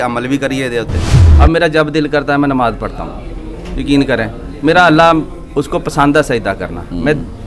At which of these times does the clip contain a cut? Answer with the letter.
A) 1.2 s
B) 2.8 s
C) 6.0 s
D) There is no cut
A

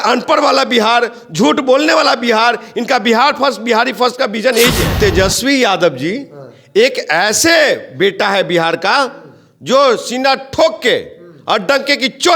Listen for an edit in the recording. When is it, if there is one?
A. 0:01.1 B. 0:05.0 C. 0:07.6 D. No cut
B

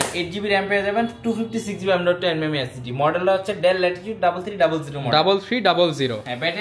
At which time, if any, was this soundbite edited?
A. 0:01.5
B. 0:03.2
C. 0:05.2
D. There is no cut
D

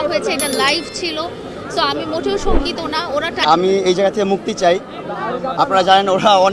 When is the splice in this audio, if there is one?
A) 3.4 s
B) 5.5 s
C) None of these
A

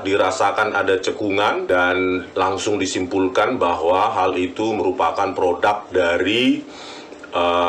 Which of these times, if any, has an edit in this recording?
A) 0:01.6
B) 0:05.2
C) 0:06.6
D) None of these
A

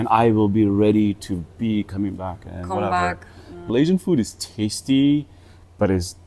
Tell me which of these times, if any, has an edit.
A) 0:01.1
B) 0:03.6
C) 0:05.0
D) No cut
B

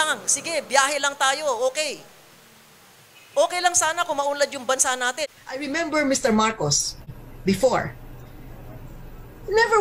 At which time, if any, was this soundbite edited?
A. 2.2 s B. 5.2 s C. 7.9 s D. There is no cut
B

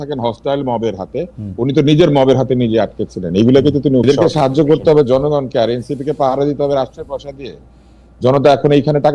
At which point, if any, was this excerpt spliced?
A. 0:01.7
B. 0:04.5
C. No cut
B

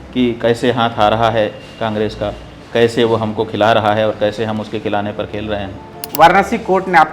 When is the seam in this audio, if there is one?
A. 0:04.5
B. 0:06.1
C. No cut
B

